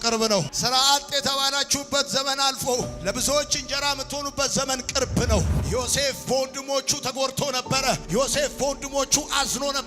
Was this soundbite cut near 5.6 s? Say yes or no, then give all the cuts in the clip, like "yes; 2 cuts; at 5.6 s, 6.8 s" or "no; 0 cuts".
yes; 1 cut; at 5.6 s